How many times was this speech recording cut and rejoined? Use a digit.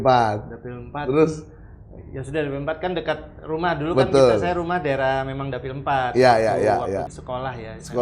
1